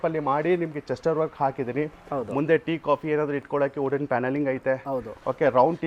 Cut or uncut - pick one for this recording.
uncut